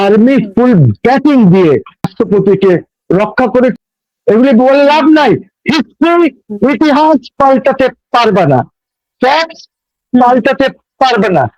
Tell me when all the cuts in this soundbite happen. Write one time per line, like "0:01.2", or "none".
0:02.1
0:03.7